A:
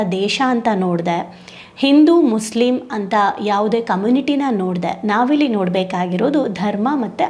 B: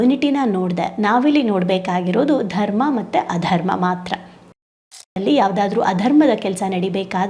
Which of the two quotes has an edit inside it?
B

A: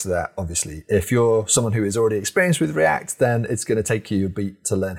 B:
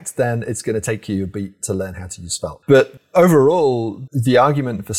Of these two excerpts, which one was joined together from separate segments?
B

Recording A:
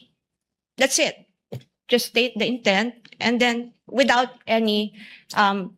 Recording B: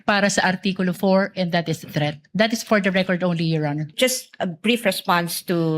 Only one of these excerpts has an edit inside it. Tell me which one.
B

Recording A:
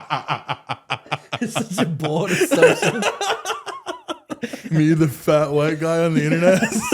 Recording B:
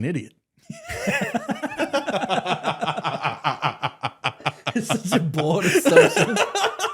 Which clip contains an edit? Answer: A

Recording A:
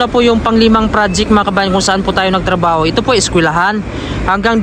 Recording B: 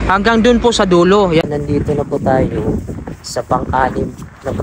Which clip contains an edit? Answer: B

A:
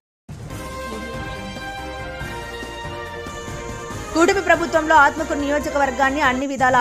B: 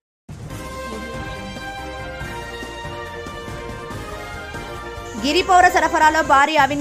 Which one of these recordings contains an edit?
B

